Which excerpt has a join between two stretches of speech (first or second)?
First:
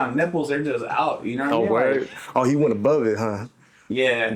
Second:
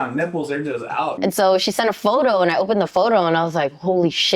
second